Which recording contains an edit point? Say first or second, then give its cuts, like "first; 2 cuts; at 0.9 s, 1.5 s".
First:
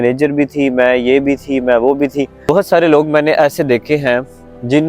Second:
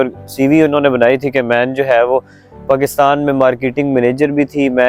first; 1 cut; at 2.4 s